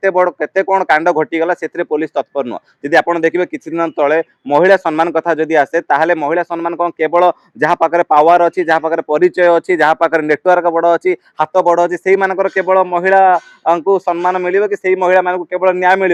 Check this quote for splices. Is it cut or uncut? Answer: uncut